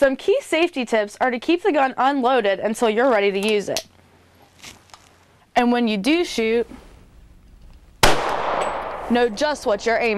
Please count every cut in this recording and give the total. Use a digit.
0